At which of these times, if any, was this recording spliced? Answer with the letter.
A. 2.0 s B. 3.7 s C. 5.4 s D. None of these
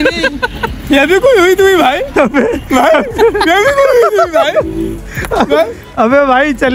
D